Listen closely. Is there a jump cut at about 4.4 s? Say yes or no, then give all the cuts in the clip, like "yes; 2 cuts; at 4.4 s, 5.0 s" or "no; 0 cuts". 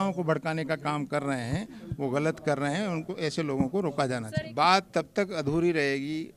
yes; 1 cut; at 4.4 s